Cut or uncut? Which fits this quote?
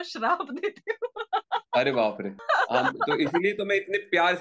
cut